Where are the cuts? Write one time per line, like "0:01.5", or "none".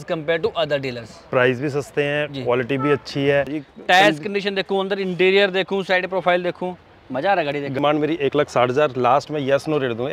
0:03.6
0:07.8